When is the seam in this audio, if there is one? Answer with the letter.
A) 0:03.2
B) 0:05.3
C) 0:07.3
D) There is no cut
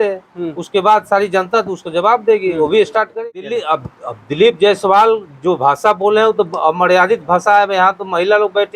A